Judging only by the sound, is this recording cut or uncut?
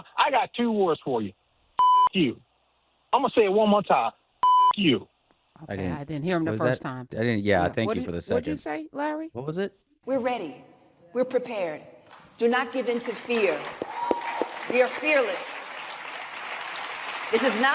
cut